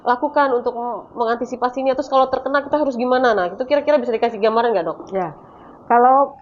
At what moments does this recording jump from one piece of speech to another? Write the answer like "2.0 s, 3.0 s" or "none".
none